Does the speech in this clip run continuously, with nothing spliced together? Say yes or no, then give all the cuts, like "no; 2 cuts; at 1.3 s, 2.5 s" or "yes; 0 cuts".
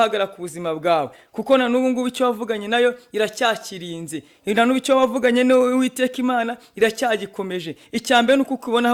yes; 0 cuts